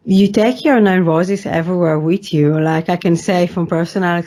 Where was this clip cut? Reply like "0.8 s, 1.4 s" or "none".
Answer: none